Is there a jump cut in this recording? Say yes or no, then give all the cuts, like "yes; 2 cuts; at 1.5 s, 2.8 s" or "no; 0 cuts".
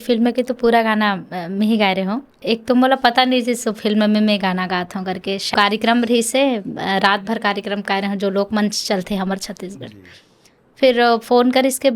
yes; 2 cuts; at 2.3 s, 5.5 s